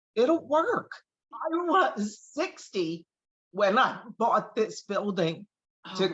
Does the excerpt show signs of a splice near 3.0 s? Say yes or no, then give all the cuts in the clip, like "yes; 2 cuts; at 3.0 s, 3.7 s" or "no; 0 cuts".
no; 1 cut; at 1.4 s